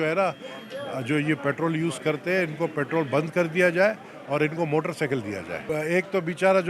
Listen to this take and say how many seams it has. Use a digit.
1